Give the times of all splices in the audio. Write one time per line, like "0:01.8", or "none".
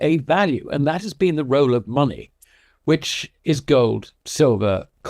none